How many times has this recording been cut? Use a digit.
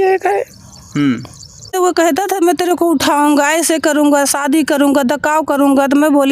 1